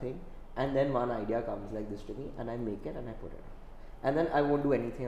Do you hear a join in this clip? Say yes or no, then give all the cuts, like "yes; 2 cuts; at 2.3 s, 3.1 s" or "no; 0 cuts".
no; 0 cuts